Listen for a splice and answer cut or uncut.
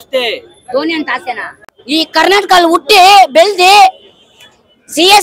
cut